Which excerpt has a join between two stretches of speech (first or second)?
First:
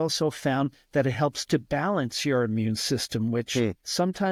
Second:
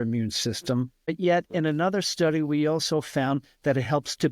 second